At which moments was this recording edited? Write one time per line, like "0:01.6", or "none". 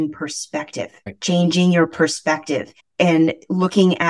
0:01.1
0:02.8